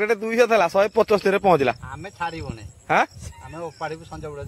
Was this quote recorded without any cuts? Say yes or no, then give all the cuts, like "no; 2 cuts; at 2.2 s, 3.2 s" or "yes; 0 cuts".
yes; 0 cuts